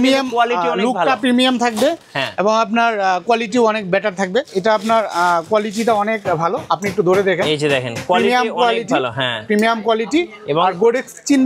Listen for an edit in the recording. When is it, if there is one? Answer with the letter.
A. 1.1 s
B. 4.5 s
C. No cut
B